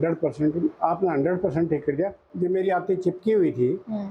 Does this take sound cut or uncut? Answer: cut